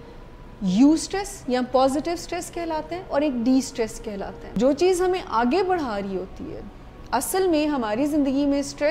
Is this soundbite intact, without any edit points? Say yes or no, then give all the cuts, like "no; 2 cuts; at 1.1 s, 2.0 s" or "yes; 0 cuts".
no; 1 cut; at 4.6 s